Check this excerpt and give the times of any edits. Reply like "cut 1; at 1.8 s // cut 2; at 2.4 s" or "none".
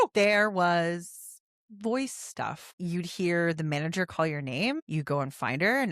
cut 1; at 2.7 s // cut 2; at 4.8 s